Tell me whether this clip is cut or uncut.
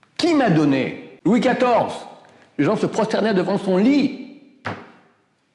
cut